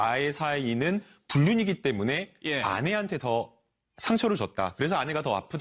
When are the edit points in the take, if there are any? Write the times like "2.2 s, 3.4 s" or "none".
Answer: 1.0 s